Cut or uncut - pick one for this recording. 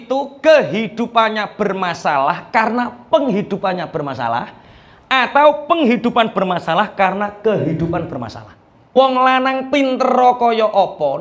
cut